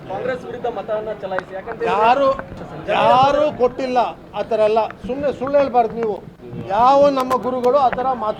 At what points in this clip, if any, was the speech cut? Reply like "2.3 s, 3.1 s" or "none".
none